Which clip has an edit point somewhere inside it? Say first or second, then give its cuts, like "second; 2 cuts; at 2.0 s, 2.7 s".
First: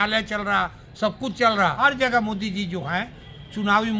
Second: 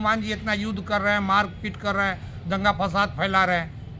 first; 1 cut; at 1.8 s